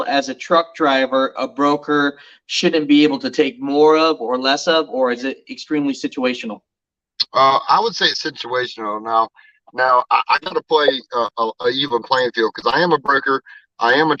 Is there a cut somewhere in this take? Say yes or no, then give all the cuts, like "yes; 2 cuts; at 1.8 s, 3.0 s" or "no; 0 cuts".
no; 0 cuts